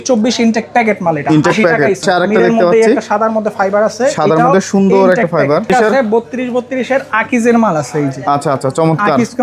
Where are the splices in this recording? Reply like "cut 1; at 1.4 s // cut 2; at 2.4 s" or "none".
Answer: cut 1; at 2.0 s // cut 2; at 5.7 s